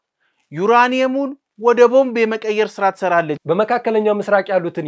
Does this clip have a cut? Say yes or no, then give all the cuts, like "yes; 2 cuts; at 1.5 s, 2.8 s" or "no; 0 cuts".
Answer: yes; 1 cut; at 3.4 s